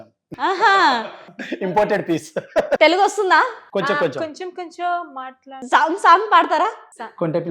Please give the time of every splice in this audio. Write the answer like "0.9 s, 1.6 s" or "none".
2.8 s, 5.6 s